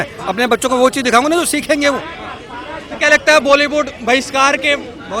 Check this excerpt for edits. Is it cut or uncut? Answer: uncut